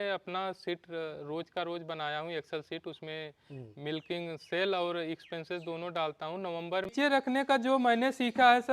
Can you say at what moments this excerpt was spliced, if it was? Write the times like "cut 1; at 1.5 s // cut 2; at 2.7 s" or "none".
cut 1; at 6.9 s